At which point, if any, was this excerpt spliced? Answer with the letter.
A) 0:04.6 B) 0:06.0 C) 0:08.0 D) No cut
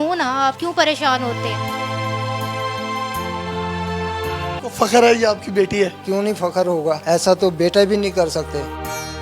A